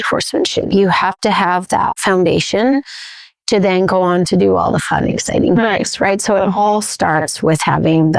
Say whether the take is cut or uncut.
uncut